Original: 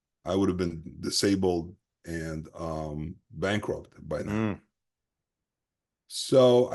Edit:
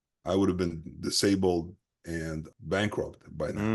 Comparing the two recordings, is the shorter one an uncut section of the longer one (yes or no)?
no